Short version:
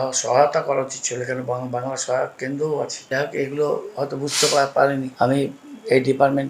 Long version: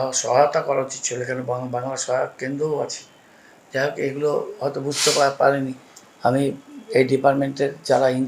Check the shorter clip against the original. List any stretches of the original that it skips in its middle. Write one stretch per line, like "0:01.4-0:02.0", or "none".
0:03.0-0:03.6
0:05.7-0:06.1

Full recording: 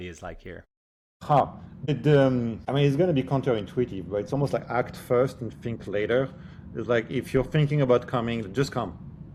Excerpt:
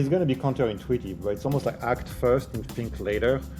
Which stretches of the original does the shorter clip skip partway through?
none

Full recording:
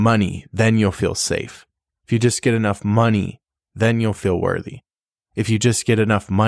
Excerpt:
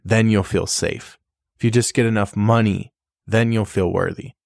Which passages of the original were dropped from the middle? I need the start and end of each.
none

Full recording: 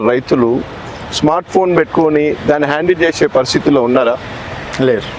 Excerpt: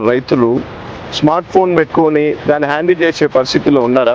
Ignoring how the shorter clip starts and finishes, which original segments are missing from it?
none

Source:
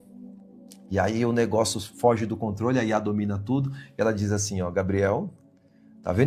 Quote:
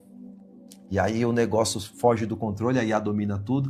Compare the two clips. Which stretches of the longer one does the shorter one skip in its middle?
none

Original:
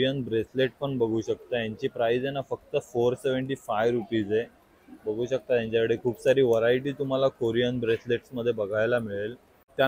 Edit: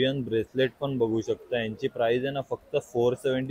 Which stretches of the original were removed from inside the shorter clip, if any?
none

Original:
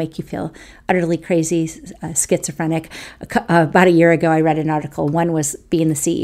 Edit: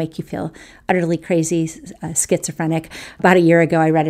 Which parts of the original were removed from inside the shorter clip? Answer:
0:03.2-0:03.7

